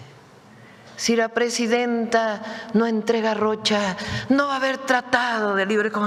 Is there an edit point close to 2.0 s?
no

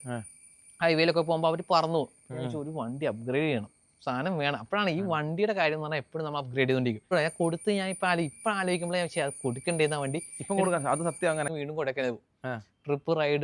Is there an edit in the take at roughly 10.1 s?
no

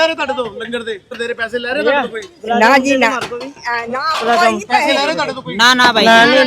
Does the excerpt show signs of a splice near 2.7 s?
no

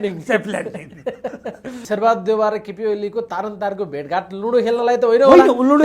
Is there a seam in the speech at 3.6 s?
no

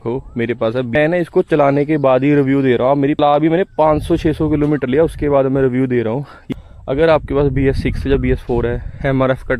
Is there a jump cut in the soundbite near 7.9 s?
no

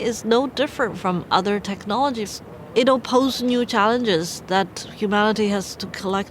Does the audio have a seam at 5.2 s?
no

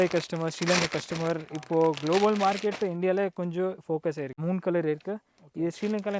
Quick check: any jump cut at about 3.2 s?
no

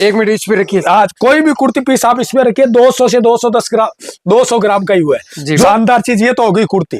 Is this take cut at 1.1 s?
no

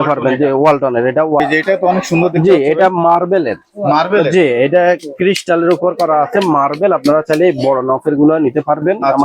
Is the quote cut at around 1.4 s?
yes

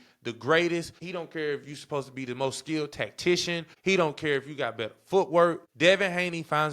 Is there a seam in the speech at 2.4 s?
no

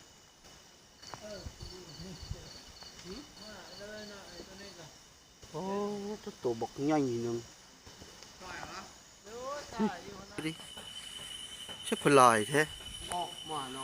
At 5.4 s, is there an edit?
no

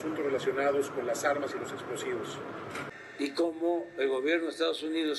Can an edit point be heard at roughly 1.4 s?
no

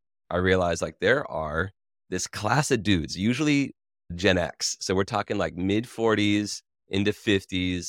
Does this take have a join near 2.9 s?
no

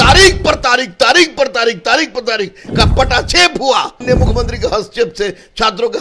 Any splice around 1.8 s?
no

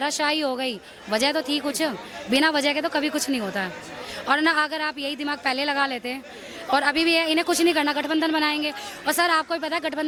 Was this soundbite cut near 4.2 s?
no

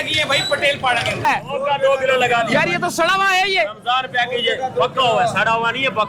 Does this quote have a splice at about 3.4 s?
no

